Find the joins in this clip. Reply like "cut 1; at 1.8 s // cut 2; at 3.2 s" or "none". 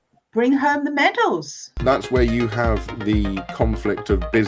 cut 1; at 1.7 s

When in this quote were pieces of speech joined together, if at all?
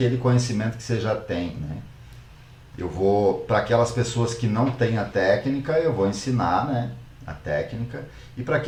none

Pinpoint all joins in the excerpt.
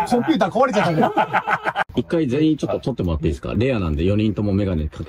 cut 1; at 1.8 s

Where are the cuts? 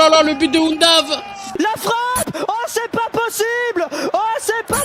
cut 1; at 1.5 s

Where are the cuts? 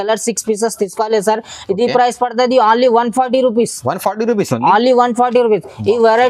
none

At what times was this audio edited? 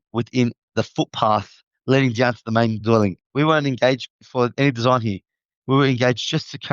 cut 1; at 3.2 s // cut 2; at 4.1 s

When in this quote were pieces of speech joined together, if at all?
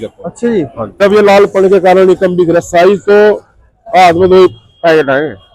cut 1; at 1.0 s

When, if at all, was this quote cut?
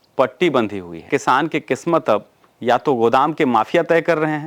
cut 1; at 1.1 s

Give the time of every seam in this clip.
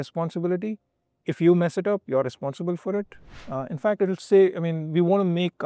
cut 1; at 3.4 s

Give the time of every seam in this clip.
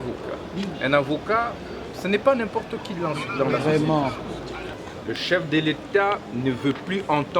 cut 1; at 4.8 s

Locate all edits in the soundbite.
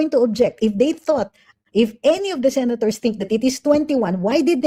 none

